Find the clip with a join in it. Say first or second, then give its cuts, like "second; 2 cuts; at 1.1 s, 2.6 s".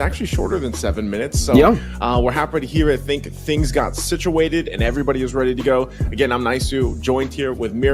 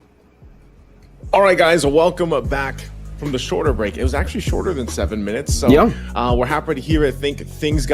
second; 1 cut; at 2.4 s